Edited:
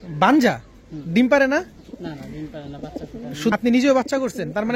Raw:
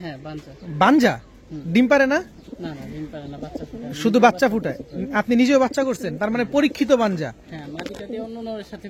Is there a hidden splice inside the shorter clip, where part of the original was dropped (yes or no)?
yes